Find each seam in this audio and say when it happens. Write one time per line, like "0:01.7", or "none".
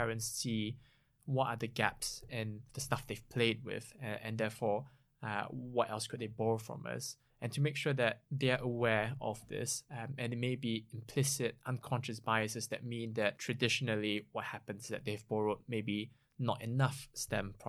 0:02.7
0:13.4